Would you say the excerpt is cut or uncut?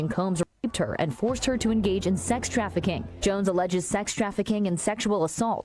cut